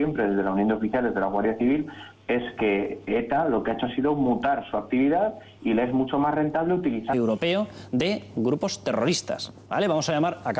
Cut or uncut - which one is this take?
uncut